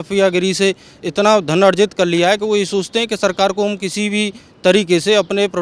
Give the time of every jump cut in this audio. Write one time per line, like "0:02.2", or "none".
none